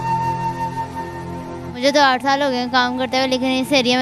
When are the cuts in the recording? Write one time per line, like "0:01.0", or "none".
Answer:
0:01.7